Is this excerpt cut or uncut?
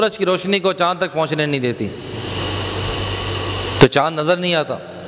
uncut